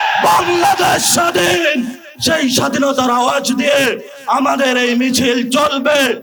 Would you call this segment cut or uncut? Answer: uncut